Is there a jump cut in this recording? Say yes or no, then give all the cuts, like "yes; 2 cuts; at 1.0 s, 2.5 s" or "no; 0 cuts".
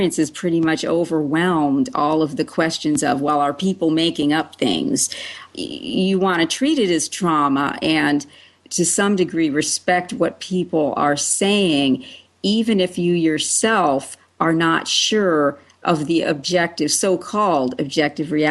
yes; 1 cut; at 5.5 s